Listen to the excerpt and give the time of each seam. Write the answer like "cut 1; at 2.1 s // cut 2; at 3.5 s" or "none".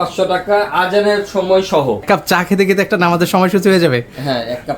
cut 1; at 2.0 s